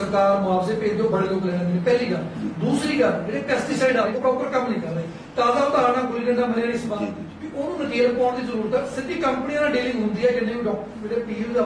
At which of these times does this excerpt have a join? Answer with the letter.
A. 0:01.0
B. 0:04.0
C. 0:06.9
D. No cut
B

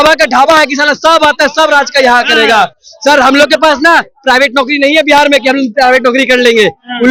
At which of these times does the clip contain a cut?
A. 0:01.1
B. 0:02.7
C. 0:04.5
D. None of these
D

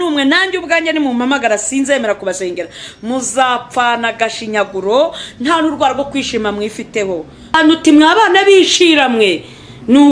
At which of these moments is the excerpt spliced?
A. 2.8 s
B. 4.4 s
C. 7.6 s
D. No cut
C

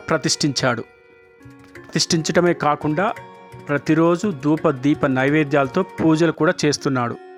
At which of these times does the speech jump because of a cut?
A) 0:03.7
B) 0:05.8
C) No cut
C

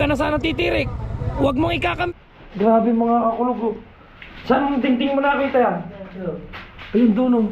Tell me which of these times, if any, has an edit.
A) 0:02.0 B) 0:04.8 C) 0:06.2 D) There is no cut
A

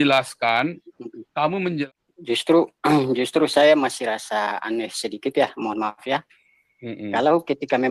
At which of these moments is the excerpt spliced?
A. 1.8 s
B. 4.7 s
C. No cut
A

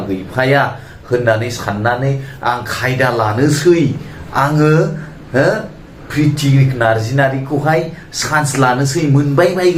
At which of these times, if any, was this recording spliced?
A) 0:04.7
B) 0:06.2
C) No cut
C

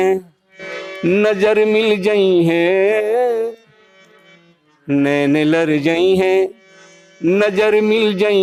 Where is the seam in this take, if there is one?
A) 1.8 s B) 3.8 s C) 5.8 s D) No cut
D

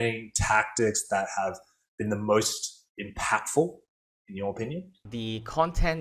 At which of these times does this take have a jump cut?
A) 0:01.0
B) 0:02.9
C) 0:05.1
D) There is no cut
C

